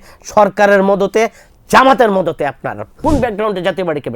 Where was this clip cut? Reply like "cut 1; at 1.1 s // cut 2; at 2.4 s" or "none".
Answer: cut 1; at 2.9 s